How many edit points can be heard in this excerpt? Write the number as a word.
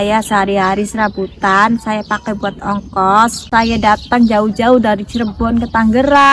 one